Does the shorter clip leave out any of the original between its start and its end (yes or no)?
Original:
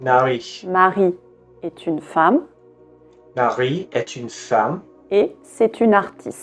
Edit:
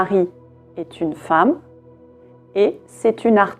yes